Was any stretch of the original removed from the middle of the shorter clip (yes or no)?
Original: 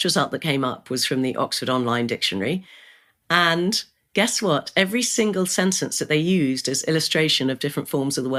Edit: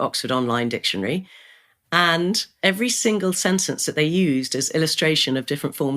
yes